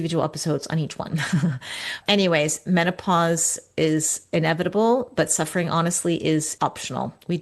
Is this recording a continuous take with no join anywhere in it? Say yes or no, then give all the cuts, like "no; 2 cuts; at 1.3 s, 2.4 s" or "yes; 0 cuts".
no; 2 cuts; at 2.0 s, 6.5 s